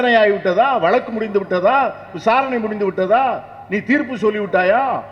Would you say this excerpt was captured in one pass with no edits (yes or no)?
yes